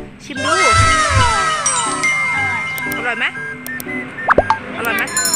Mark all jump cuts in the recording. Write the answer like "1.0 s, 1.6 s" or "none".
none